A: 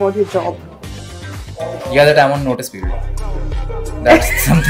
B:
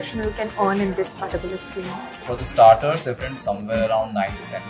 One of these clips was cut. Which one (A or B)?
B